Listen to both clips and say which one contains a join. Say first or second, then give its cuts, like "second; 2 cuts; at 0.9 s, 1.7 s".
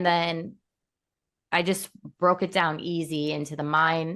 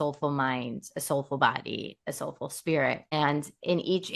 second; 1 cut; at 3.1 s